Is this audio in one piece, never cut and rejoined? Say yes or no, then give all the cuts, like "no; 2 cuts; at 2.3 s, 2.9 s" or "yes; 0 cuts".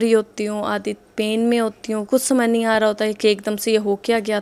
yes; 0 cuts